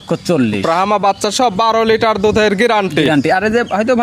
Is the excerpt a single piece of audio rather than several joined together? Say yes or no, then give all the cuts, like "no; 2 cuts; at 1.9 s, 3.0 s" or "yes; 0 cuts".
yes; 0 cuts